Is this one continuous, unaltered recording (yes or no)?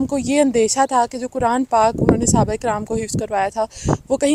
yes